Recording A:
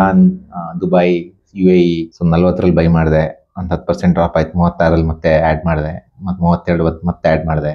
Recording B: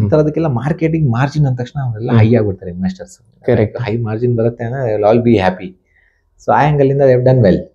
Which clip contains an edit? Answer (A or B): A